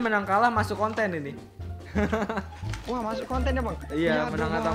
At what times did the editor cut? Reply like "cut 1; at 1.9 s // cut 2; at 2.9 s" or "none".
none